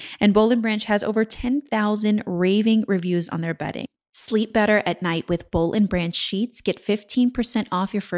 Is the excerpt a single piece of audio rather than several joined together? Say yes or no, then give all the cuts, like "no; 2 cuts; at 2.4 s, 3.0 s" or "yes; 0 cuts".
no; 1 cut; at 3.9 s